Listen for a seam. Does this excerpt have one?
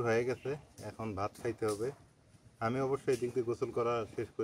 no; 0 cuts

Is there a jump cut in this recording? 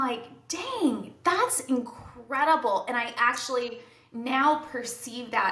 no; 0 cuts

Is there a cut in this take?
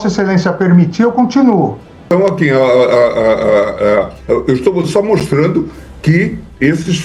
yes; 1 cut; at 2.1 s

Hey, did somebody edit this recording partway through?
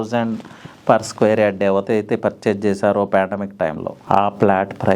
yes; 1 cut; at 3.9 s

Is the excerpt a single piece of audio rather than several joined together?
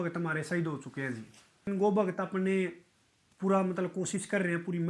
no; 1 cut; at 1.7 s

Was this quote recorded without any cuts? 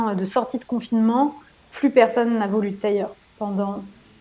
yes; 0 cuts

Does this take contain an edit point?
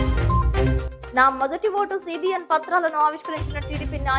no; 0 cuts

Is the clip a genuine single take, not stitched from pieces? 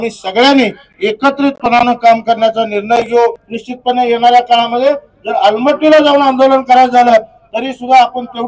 no; 1 cut; at 3.5 s

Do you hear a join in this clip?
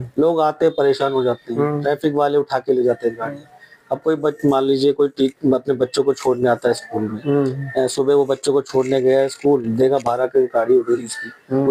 no; 0 cuts

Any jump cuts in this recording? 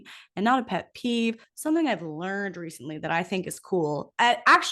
yes; 1 cut; at 1.5 s

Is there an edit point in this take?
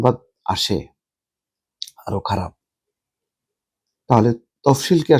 no; 0 cuts

